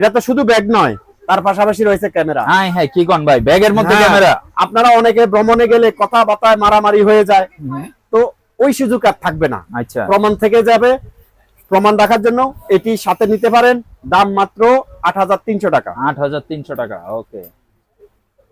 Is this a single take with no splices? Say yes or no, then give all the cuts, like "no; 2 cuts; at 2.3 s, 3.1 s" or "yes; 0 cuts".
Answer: yes; 0 cuts